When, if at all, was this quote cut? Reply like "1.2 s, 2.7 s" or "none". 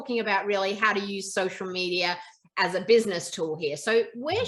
none